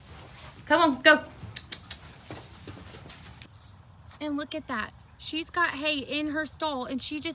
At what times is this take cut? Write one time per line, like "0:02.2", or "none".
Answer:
0:03.4